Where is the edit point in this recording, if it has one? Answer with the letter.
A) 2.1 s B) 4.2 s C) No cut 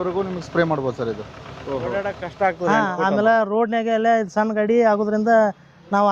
A